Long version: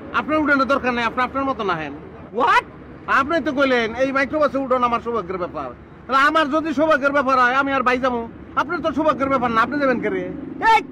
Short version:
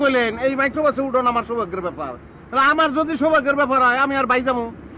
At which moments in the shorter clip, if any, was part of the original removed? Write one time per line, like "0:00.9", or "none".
none